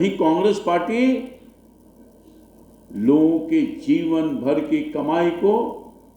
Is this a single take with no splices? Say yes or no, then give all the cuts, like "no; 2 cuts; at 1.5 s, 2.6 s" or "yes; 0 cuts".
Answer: yes; 0 cuts